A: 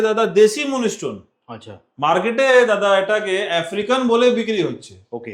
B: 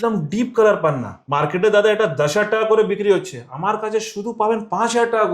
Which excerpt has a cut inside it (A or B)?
B